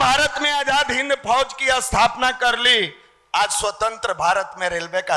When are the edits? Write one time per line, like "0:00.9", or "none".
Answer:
none